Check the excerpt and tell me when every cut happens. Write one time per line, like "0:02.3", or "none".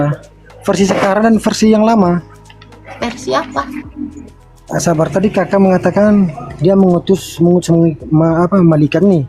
0:04.3